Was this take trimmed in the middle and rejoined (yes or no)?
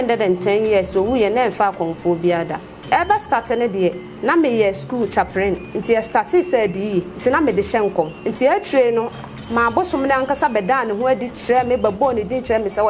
yes